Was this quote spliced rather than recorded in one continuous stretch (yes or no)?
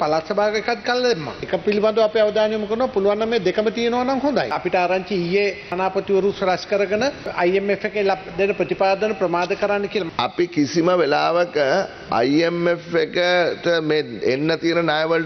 yes